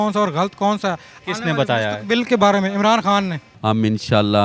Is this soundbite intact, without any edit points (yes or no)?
no